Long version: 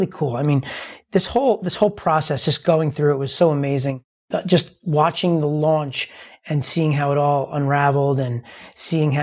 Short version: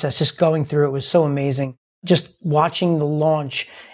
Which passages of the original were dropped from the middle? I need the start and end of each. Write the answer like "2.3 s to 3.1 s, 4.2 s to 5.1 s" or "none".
4.1 s to 4.3 s